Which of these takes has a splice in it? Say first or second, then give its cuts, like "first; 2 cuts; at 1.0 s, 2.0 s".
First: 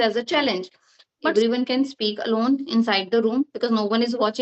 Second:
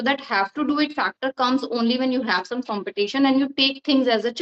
first; 1 cut; at 1.3 s